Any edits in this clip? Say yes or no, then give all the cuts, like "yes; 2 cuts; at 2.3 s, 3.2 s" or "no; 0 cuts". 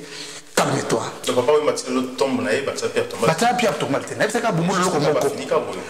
no; 0 cuts